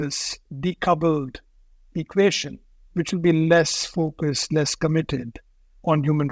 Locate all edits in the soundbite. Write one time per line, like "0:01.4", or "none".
none